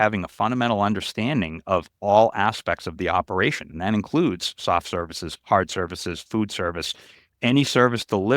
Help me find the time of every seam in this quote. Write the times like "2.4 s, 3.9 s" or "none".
none